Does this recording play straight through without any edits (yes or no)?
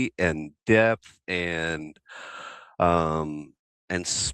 yes